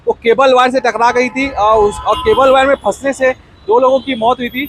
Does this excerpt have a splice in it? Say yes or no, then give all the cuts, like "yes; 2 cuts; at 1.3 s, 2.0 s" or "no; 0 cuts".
no; 0 cuts